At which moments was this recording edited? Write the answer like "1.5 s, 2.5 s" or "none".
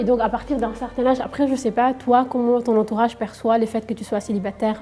none